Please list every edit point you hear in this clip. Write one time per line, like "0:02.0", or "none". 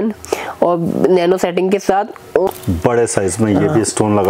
0:02.5